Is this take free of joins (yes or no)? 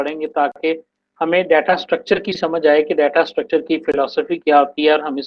yes